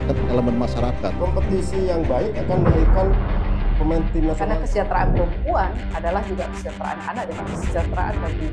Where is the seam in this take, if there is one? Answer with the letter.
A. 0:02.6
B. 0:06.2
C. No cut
C